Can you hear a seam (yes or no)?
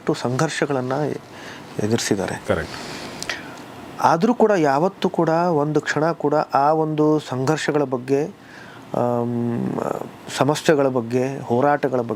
no